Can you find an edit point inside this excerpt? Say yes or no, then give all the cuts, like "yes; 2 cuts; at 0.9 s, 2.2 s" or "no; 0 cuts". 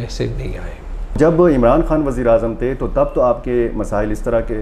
yes; 1 cut; at 1.2 s